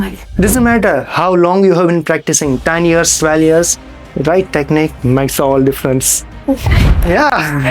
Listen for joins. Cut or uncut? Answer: uncut